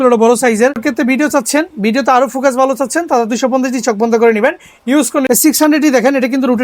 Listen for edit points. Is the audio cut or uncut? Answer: cut